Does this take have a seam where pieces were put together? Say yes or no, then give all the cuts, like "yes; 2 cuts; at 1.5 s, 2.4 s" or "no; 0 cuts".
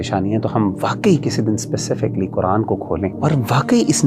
yes; 1 cut; at 3.2 s